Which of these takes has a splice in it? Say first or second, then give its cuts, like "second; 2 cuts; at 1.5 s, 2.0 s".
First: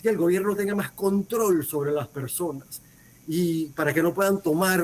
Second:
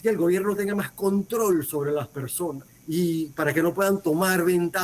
second; 1 cut; at 2.7 s